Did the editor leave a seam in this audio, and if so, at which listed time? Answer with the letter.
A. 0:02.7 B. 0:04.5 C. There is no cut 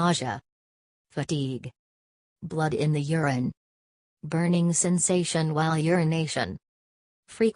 A